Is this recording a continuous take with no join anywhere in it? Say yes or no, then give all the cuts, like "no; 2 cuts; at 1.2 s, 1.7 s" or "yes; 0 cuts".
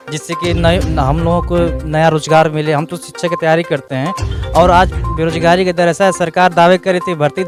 yes; 0 cuts